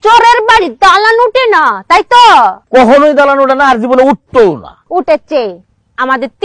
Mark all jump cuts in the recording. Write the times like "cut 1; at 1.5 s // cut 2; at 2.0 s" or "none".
cut 1; at 2.6 s // cut 2; at 4.7 s